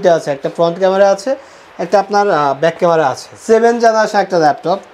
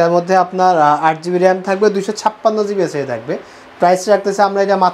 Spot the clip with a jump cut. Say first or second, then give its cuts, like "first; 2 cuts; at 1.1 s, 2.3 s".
first; 1 cut; at 3.3 s